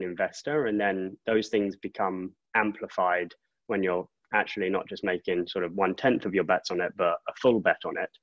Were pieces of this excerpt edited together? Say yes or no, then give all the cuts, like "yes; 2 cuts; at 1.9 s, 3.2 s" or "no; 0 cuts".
no; 0 cuts